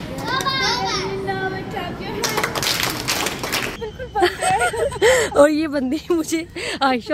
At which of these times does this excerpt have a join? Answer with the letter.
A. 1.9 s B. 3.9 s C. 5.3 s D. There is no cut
B